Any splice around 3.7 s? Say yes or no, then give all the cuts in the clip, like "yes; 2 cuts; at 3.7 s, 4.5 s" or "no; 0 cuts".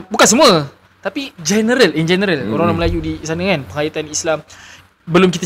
no; 0 cuts